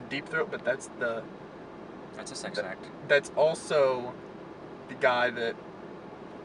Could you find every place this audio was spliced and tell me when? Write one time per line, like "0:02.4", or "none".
0:02.0